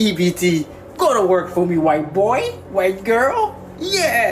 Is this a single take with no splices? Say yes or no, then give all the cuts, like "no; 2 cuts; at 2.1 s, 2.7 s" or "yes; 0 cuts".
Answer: yes; 0 cuts